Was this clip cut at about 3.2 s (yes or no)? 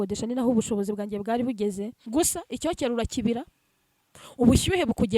no